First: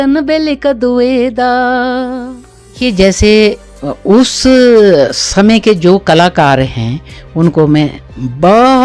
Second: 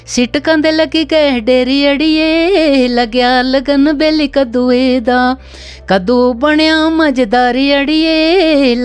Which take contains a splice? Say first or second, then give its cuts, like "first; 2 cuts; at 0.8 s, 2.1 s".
first; 1 cut; at 2.8 s